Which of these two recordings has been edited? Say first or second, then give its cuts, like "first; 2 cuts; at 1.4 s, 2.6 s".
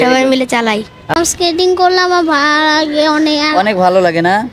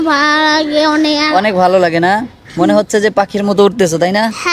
first; 1 cut; at 1.2 s